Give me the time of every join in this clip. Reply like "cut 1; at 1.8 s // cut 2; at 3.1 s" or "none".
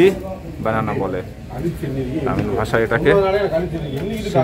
none